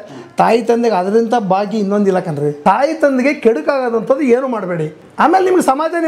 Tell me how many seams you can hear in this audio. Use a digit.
2